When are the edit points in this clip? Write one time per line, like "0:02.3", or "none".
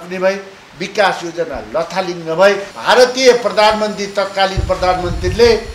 0:02.7